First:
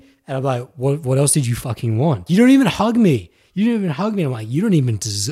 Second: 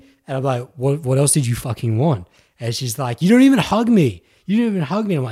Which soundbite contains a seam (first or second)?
first